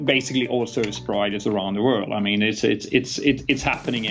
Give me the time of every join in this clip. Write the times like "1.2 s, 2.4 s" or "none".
none